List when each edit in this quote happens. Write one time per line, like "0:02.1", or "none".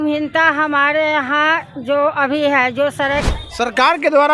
0:03.3